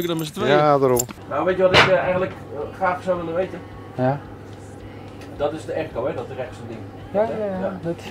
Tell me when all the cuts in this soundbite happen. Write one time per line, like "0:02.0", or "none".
0:01.1